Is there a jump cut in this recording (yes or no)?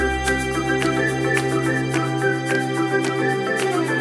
no